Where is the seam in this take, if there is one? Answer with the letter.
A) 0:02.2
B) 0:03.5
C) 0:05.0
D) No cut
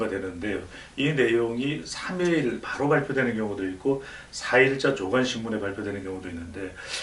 A